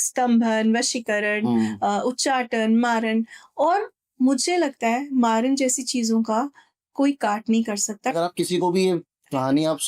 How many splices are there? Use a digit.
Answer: 1